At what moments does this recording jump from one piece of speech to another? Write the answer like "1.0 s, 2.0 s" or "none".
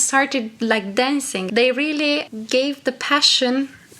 1.4 s, 2.3 s

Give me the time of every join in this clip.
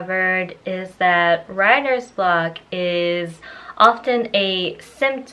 none

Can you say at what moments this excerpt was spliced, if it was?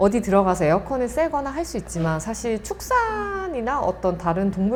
none

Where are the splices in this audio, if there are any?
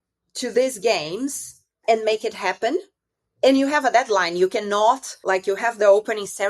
5.1 s

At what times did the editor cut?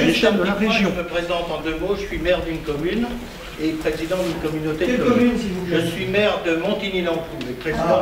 1.0 s

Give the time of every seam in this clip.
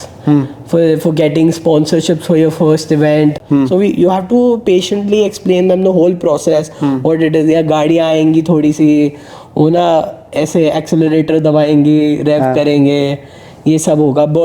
3.4 s

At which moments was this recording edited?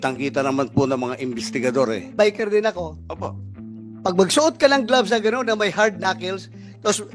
2.0 s

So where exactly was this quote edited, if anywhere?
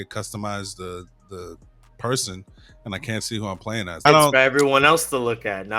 4.0 s

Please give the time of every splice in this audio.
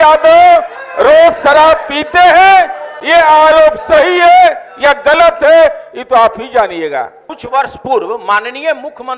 7.3 s

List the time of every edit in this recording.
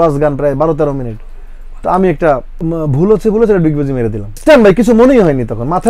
2.5 s, 4.4 s

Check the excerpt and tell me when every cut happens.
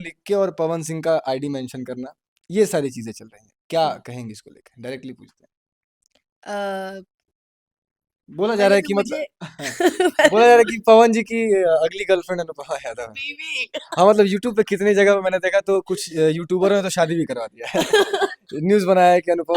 none

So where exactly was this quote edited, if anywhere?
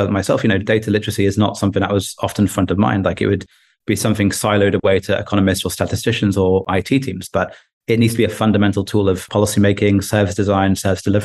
6.7 s, 9.2 s

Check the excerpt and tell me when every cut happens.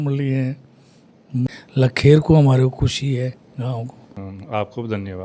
1.5 s, 4.3 s

